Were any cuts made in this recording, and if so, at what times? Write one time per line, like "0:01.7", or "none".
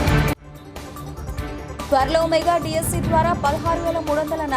0:01.9

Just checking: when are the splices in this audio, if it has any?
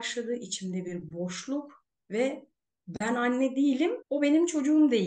0:04.0

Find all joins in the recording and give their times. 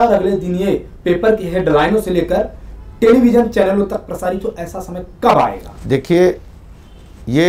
none

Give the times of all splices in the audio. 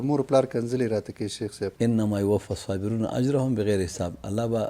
0:01.7

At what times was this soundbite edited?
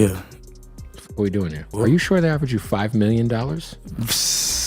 0:01.7

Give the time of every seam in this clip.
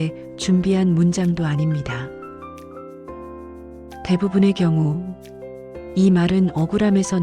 0:02.5
0:04.0

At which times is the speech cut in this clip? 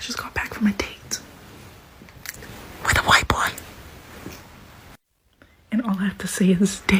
none

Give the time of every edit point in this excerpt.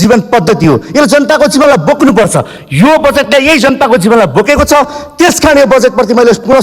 none

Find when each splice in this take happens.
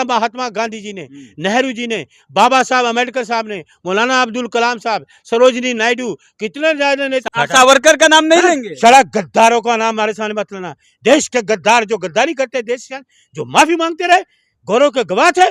0:07.2

